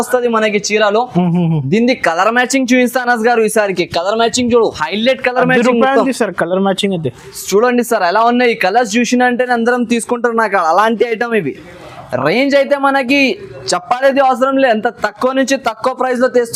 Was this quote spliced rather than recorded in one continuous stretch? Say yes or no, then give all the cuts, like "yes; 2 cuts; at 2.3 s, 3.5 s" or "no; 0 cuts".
no; 0 cuts